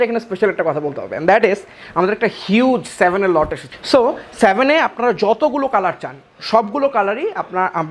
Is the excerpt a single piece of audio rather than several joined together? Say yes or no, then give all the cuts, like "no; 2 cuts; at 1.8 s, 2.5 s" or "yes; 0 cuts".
yes; 0 cuts